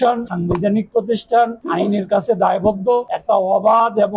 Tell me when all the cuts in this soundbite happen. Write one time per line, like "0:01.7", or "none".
0:03.1